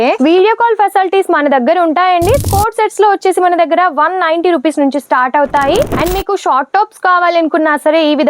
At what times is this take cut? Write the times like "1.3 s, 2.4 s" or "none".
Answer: 2.4 s, 6.0 s